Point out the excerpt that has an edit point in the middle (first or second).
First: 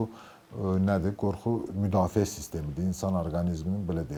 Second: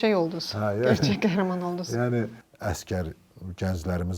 second